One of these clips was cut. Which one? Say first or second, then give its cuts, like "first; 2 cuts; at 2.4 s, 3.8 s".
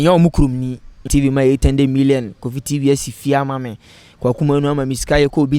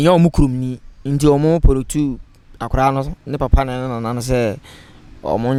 first; 1 cut; at 1.0 s